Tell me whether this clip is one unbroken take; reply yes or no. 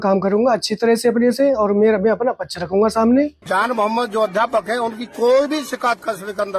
no